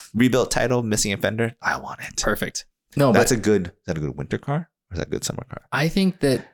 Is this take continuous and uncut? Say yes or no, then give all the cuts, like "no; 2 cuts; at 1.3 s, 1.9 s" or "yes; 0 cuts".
yes; 0 cuts